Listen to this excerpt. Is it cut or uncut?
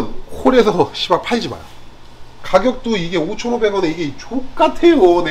cut